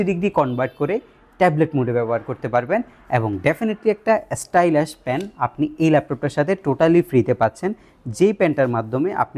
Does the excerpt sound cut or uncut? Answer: uncut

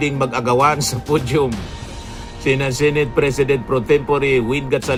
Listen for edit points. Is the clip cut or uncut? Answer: uncut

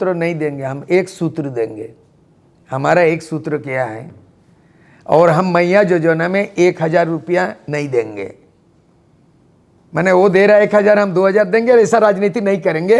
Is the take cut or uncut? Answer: uncut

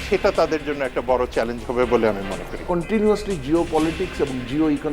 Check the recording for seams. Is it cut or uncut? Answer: cut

